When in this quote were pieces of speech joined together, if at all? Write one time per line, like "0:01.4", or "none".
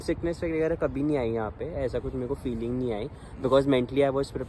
none